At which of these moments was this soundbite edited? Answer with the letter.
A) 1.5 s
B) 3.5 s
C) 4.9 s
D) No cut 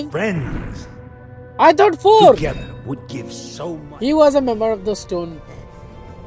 B